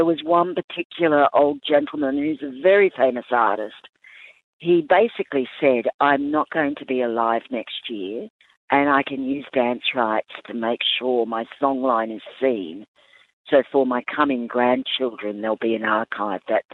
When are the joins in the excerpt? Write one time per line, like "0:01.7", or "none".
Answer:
none